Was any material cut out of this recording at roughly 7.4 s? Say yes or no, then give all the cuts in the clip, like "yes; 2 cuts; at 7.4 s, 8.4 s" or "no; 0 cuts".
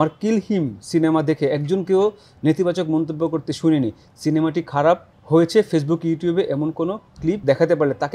yes; 2 cuts; at 5.1 s, 7.4 s